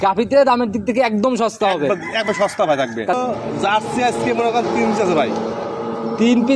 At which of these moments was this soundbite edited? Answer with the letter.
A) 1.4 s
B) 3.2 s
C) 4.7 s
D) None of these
B